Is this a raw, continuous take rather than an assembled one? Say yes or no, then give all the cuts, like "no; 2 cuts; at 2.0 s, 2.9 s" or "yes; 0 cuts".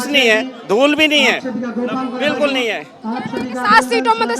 yes; 0 cuts